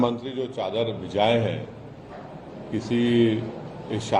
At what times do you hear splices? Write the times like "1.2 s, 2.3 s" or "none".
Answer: none